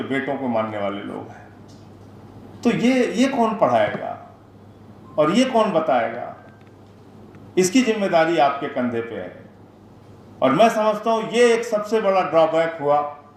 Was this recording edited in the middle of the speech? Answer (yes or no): no